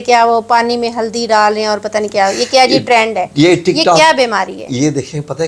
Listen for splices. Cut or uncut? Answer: uncut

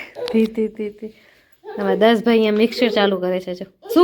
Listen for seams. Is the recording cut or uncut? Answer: uncut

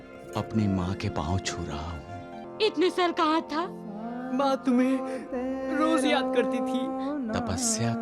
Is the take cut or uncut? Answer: cut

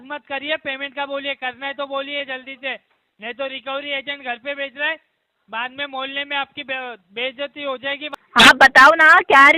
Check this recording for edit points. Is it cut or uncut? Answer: cut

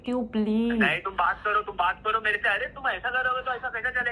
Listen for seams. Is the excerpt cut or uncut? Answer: uncut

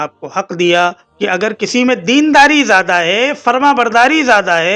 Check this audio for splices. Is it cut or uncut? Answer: uncut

